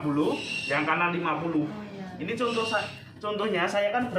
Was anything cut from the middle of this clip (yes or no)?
no